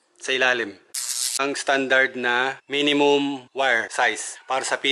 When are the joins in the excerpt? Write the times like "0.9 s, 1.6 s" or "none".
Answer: 1.3 s, 2.6 s, 4.0 s